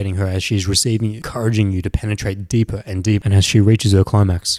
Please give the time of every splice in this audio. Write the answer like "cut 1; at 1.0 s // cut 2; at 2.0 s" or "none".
cut 1; at 1.2 s // cut 2; at 3.2 s

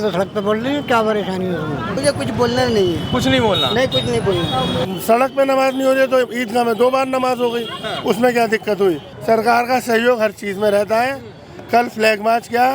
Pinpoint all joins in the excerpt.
cut 1; at 2.0 s // cut 2; at 4.9 s // cut 3; at 9.1 s

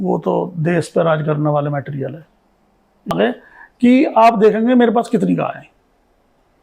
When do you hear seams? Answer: cut 1; at 3.1 s

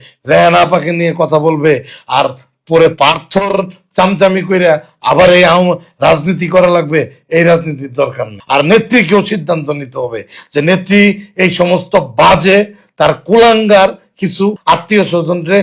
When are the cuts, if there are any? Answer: cut 1; at 8.3 s // cut 2; at 14.6 s

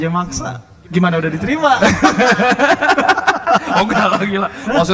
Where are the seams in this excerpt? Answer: none

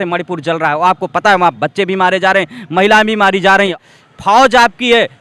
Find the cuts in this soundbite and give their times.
cut 1; at 3.8 s

